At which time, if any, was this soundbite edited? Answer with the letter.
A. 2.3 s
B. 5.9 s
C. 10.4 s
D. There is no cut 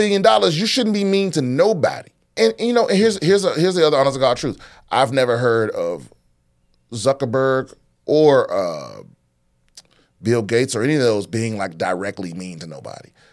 A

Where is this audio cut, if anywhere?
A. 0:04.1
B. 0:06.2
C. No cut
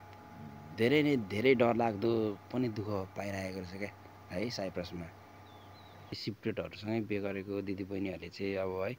B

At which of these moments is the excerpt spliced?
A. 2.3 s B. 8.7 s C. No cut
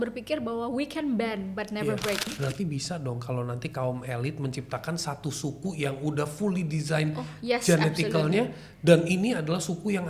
A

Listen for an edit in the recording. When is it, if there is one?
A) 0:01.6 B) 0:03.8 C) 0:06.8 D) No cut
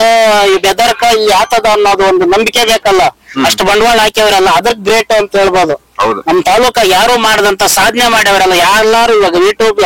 D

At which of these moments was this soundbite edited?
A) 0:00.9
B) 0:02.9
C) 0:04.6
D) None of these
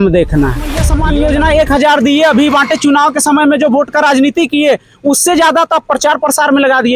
A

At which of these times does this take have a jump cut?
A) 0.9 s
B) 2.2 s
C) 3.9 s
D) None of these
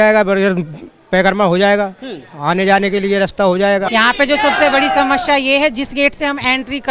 C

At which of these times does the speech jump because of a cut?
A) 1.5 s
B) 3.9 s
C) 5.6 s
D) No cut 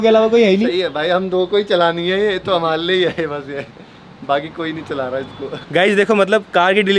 C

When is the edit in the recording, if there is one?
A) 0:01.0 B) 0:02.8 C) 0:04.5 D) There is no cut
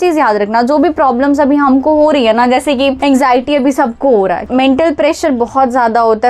C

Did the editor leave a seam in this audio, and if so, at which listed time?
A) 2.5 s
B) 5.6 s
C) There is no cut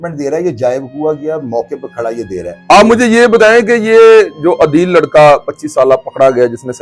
A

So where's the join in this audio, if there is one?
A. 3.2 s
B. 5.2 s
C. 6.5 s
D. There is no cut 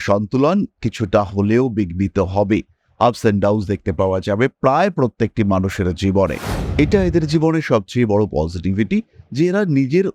C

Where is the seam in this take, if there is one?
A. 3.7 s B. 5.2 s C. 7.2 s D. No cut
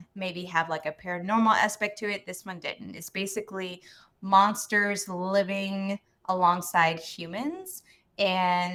D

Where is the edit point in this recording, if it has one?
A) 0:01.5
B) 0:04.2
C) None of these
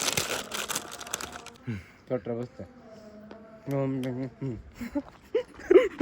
A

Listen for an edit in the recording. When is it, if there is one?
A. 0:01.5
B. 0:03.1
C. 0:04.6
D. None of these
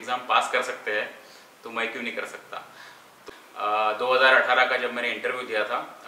B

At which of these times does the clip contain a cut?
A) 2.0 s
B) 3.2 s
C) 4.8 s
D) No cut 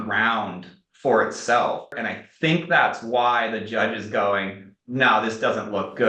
A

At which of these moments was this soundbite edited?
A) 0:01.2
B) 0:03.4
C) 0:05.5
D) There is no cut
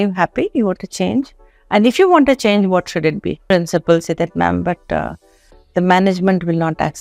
B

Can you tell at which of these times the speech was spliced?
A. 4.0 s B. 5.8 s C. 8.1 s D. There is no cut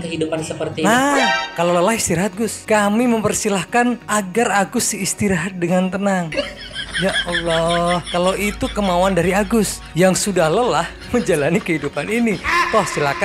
D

